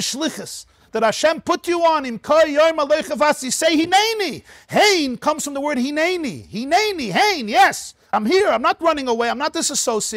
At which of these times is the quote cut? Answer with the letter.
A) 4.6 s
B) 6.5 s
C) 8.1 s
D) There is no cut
C